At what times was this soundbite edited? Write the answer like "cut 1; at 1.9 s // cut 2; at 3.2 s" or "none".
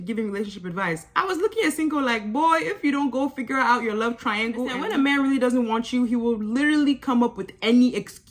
cut 1; at 4.8 s